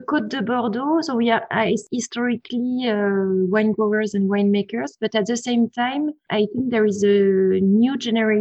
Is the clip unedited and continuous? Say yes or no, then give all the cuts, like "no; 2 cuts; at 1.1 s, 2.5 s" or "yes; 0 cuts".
yes; 0 cuts